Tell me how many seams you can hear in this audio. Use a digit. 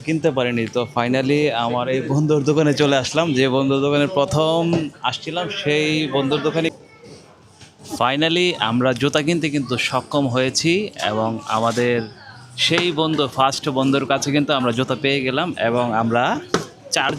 1